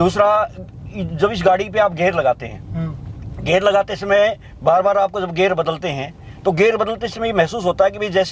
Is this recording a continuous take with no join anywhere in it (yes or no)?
yes